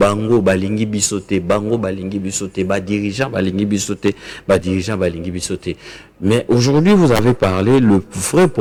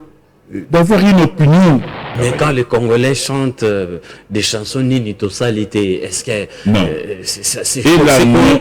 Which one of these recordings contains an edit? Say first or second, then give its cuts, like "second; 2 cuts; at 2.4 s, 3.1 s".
second; 1 cut; at 2.1 s